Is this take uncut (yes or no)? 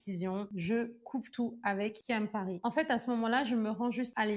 yes